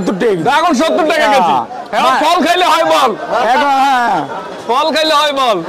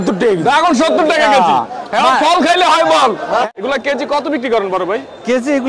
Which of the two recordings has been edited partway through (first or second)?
second